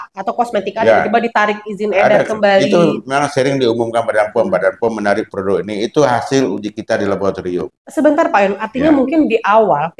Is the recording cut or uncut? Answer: uncut